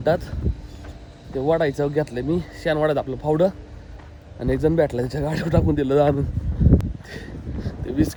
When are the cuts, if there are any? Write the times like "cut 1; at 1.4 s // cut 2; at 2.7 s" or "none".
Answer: none